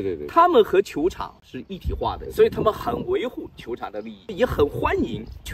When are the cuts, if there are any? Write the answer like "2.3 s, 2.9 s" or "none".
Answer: 2.2 s, 4.2 s